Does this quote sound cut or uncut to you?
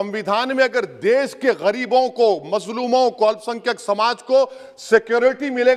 uncut